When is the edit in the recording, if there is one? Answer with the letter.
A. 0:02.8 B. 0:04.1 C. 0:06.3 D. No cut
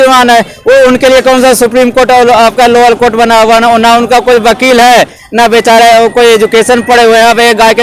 D